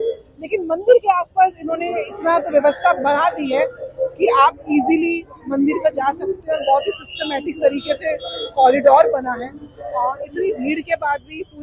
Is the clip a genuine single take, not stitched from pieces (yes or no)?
yes